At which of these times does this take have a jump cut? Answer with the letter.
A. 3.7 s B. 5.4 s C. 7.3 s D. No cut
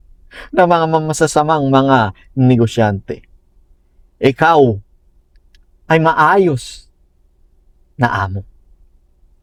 D